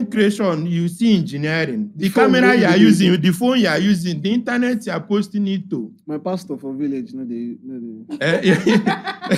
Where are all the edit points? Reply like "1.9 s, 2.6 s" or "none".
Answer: none